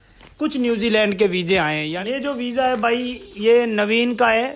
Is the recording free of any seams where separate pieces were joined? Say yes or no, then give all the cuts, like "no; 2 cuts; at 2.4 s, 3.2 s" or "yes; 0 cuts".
no; 1 cut; at 1.9 s